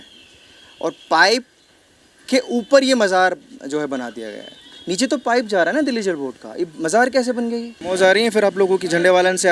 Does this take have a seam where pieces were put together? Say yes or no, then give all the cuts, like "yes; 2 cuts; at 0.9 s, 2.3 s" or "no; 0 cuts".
yes; 1 cut; at 7.7 s